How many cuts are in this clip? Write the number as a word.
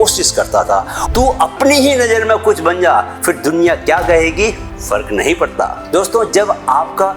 three